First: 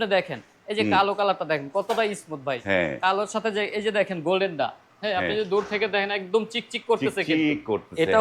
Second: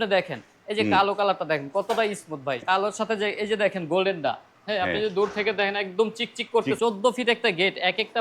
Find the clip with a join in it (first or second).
second